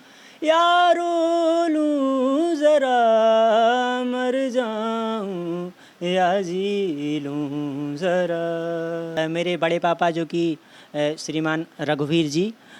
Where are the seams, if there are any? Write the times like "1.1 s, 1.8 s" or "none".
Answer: 9.1 s